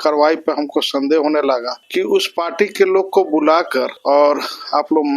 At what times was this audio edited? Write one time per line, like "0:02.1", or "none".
0:01.8
0:03.9